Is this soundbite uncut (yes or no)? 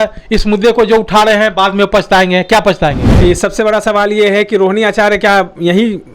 no